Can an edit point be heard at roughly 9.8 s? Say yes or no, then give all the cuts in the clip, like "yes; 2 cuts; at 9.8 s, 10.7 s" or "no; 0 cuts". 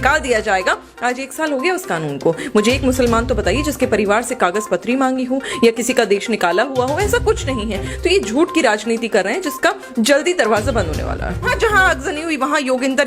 no; 1 cut; at 11.5 s